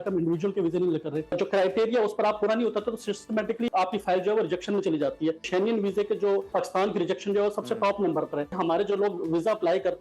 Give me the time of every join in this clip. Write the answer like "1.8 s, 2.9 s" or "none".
1.4 s, 3.7 s, 5.4 s, 6.5 s, 8.5 s

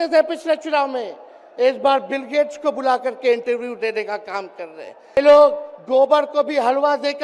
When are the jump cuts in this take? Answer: 5.2 s

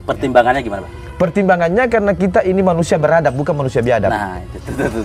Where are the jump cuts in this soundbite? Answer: none

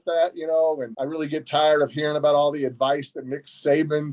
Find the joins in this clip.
0.9 s

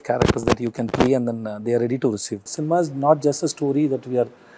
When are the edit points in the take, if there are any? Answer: 2.5 s

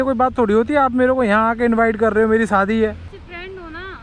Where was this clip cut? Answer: 3.1 s

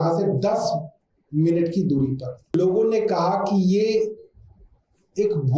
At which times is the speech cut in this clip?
2.5 s

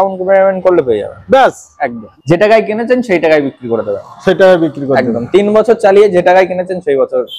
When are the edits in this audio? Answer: 2.0 s

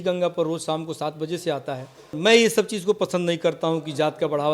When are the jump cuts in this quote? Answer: 2.1 s

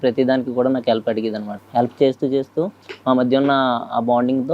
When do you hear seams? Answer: 1.5 s

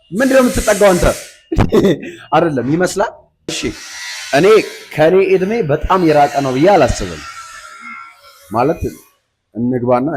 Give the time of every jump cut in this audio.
3.7 s

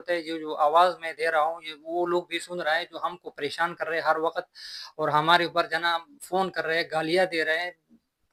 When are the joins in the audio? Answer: none

